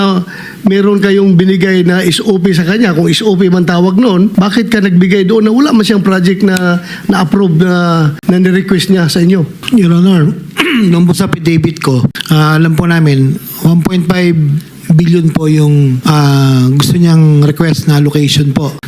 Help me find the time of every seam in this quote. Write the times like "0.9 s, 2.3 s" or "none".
none